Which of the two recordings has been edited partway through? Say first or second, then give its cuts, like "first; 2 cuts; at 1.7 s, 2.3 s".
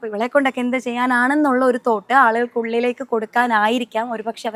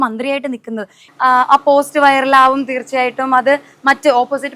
second; 1 cut; at 1.0 s